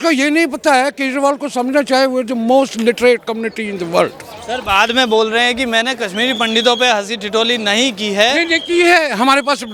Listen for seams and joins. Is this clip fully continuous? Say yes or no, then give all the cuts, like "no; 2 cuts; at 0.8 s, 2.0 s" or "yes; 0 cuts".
yes; 0 cuts